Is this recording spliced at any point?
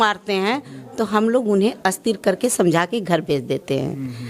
no; 0 cuts

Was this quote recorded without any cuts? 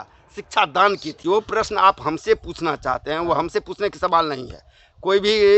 no; 1 cut; at 1.1 s

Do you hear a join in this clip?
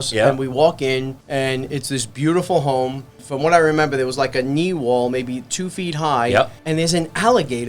yes; 3 cuts; at 1.2 s, 3.2 s, 6.6 s

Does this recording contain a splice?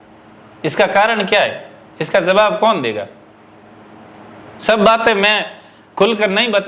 no; 0 cuts

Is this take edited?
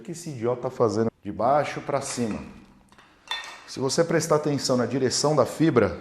yes; 1 cut; at 1.2 s

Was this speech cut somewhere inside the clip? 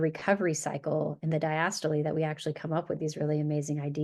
no; 0 cuts

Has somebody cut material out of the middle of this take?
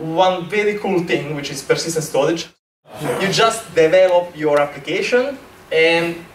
yes; 1 cut; at 2.6 s

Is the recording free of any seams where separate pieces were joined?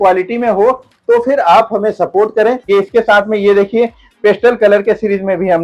yes; 0 cuts

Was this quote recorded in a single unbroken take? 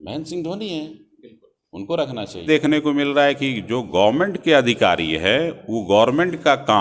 no; 1 cut; at 2.5 s

